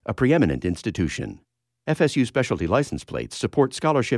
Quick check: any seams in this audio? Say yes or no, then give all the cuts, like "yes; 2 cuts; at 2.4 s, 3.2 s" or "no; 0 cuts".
no; 0 cuts